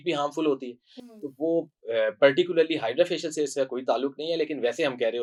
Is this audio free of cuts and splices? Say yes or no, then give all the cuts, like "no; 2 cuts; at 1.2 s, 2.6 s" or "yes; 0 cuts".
yes; 0 cuts